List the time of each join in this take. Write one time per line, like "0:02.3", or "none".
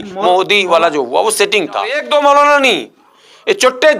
0:02.0